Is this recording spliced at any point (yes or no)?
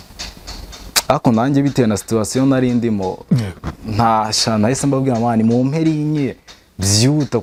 no